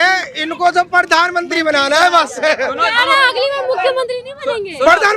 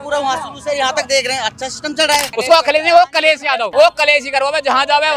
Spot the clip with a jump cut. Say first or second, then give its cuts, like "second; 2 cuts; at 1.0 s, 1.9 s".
second; 2 cuts; at 2.3 s, 3.7 s